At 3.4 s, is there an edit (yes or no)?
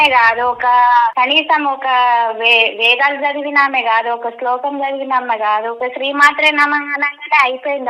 no